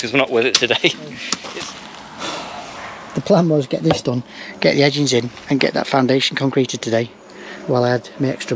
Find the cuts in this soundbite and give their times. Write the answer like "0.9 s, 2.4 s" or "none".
1.3 s